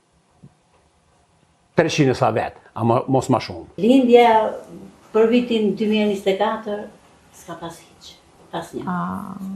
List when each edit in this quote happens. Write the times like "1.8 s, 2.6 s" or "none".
3.7 s